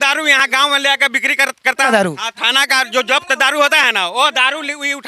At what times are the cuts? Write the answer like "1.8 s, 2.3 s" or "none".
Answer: 1.9 s